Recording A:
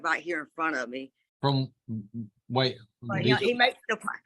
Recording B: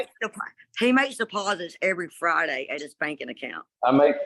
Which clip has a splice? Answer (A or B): A